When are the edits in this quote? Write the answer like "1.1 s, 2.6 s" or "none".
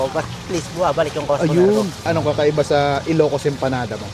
2.0 s